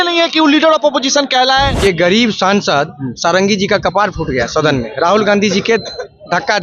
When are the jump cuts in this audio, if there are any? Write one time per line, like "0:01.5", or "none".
0:01.7